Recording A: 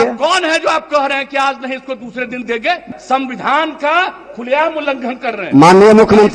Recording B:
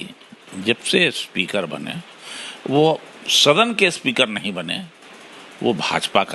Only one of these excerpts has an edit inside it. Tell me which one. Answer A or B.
A